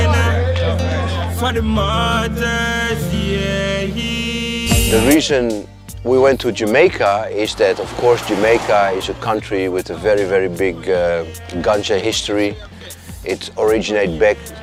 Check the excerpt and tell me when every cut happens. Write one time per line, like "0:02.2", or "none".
none